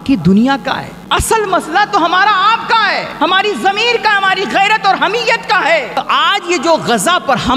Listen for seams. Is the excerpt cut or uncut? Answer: cut